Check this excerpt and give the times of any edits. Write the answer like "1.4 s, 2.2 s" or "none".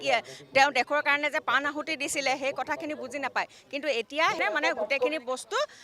4.4 s